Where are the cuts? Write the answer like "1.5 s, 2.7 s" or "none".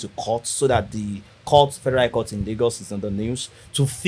none

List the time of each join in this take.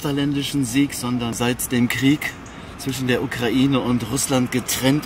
1.3 s

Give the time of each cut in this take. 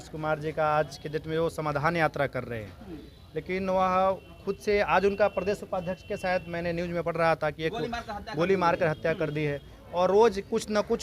none

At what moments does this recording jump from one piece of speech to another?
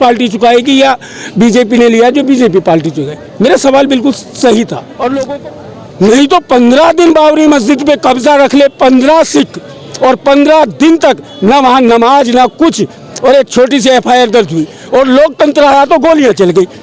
5.3 s

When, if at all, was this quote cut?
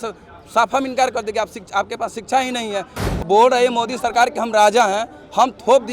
3.0 s

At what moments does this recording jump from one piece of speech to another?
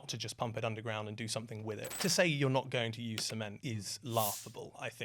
1.9 s, 3.6 s

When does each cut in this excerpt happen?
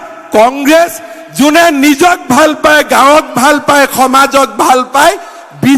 none

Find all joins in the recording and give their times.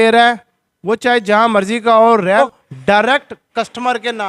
2.4 s

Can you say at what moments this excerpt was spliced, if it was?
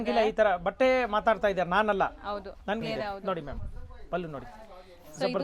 2.8 s

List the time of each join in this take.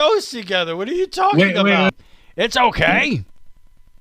1.9 s

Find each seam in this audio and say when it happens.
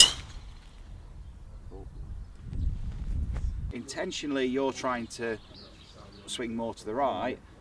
none

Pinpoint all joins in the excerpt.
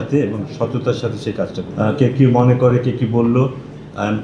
1.7 s

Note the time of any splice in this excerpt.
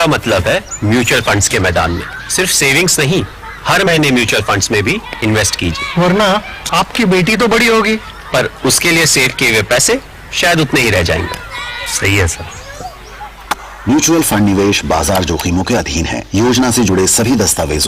none

